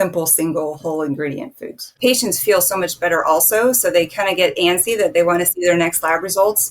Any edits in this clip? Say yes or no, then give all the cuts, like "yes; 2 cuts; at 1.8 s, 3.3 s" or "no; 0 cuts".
yes; 1 cut; at 1.9 s